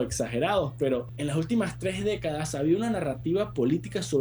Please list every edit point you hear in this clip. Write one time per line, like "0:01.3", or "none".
0:01.1